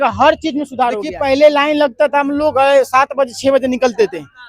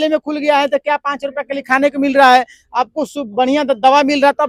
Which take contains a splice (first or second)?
first